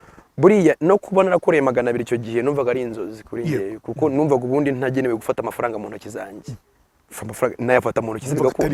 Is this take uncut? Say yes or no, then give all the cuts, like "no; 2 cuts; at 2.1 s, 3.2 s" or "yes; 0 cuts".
yes; 0 cuts